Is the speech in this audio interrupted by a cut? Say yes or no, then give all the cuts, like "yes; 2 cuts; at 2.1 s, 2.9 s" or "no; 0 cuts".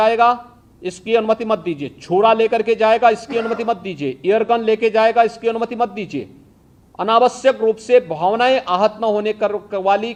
no; 0 cuts